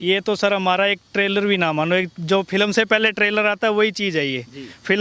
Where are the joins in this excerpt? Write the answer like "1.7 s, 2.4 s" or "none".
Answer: none